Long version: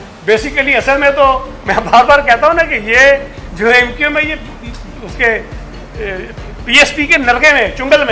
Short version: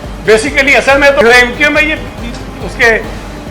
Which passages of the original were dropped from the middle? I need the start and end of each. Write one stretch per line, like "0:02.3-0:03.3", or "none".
0:01.2-0:03.6